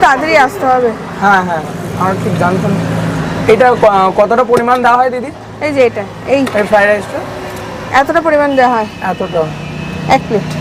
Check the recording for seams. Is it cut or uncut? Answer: uncut